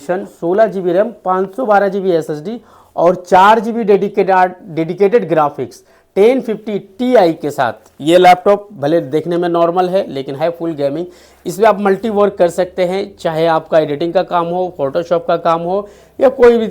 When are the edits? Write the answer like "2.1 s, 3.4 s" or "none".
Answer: none